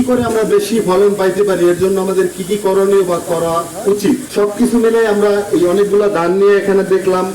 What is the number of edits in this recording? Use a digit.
1